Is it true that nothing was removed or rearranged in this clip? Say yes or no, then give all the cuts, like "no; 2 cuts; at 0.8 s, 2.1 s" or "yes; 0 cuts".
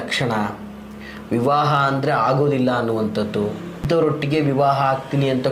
no; 1 cut; at 3.8 s